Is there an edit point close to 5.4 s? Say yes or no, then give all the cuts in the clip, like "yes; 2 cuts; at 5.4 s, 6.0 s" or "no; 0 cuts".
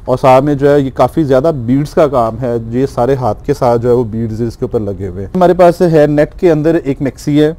yes; 1 cut; at 5.4 s